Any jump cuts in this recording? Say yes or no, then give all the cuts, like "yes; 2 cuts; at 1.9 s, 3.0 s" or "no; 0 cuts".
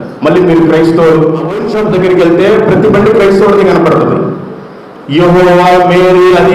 yes; 1 cut; at 1.6 s